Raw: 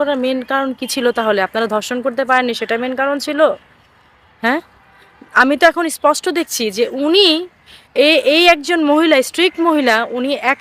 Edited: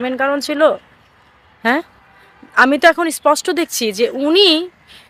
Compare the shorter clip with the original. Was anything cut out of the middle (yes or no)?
no